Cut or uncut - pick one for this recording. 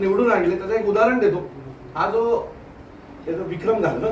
uncut